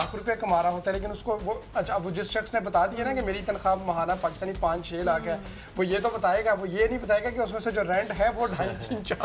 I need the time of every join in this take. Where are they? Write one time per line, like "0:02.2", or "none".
none

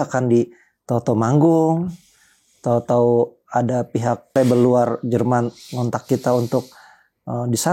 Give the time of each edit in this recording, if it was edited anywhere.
0:04.3

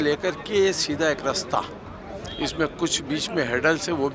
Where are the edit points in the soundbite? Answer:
none

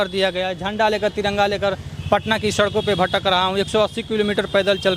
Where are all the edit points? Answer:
none

